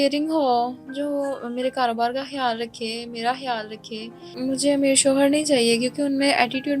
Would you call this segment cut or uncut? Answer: cut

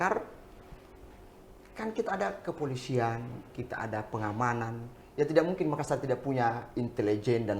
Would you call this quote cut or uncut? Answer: uncut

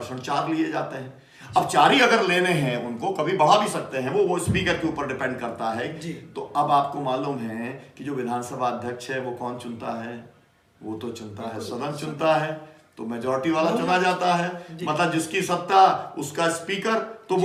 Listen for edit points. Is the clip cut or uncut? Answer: uncut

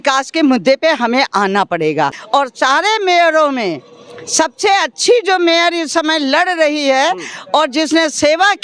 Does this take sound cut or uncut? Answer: cut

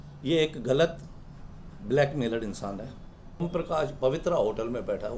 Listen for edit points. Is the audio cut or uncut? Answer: cut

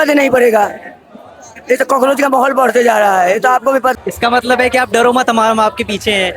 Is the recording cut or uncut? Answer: cut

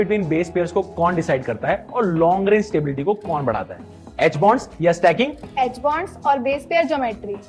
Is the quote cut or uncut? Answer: uncut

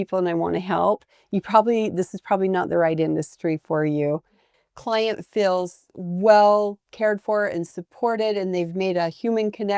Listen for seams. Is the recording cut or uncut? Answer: cut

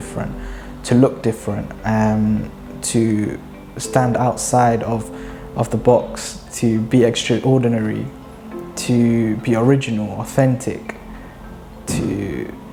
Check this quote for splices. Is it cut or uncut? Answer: uncut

